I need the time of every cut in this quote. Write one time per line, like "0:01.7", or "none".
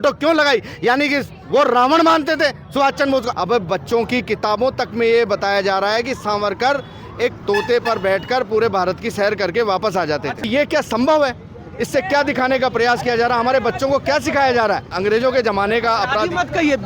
0:03.3
0:07.4
0:10.5
0:15.0